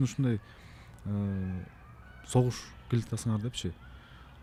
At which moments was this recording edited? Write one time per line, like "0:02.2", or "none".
none